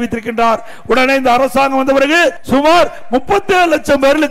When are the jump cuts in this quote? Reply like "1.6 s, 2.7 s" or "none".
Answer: 2.4 s